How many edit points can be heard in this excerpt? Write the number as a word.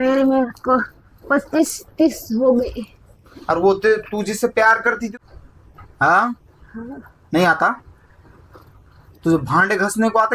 one